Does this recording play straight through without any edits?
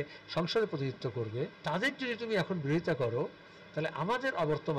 no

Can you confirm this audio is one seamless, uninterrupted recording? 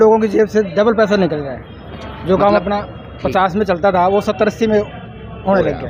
yes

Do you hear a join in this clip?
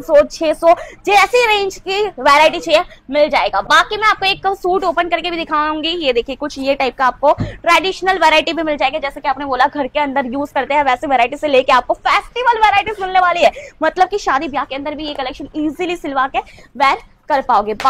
no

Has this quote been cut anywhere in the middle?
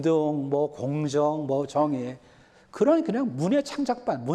no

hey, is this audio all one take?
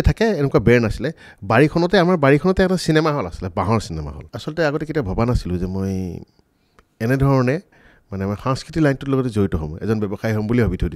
no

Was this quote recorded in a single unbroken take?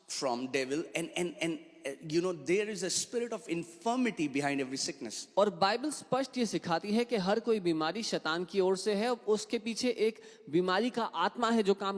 yes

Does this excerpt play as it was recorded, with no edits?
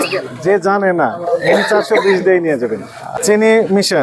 no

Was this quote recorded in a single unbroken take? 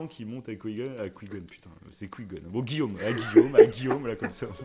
yes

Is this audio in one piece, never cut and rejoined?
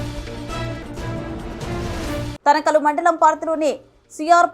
no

